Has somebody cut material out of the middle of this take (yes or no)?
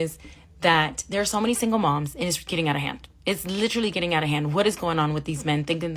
no